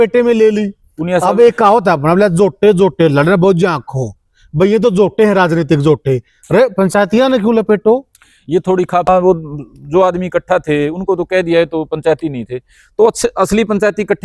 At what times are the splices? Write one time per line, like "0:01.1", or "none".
0:09.1